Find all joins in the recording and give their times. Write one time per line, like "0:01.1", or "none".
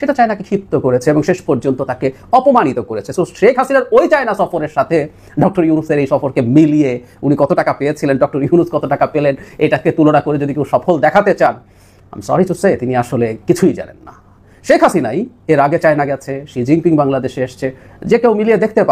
none